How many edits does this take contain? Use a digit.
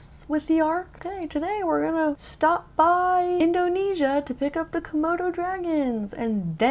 3